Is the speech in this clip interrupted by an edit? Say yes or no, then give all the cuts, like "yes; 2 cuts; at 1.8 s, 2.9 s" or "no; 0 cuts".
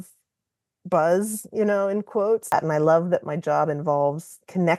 yes; 1 cut; at 2.4 s